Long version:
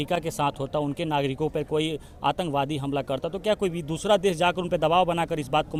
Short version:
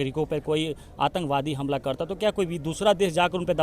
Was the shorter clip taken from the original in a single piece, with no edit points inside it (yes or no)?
yes